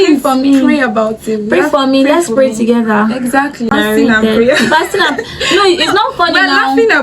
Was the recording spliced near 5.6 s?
no; 1 cut; at 3.7 s

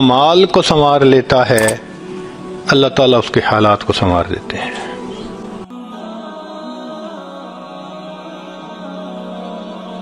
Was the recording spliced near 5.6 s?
yes; 1 cut; at 5.6 s

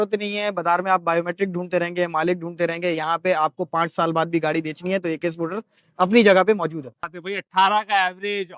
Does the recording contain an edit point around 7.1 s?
yes; 1 cut; at 7.1 s

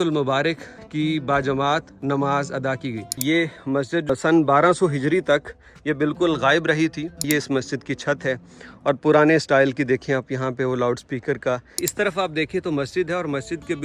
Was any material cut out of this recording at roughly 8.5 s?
no; 3 cuts; at 3.5 s, 7.3 s, 11.8 s

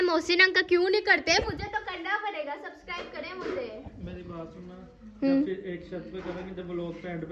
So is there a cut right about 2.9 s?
no; 0 cuts

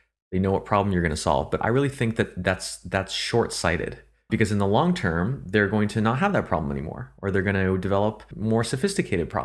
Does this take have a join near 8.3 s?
yes; 2 cuts; at 4.3 s, 8.3 s

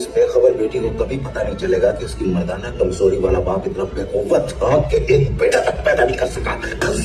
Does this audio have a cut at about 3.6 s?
no; 0 cuts

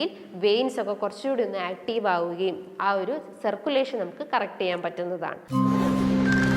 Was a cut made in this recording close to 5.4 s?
yes; 1 cut; at 5.4 s

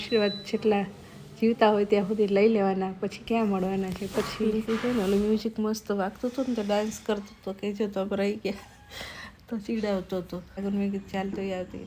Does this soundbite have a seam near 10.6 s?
yes; 1 cut; at 10.6 s

